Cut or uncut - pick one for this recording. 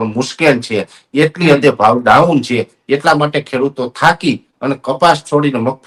uncut